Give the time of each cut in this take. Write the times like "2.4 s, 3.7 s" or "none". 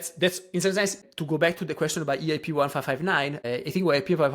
1.1 s, 3.5 s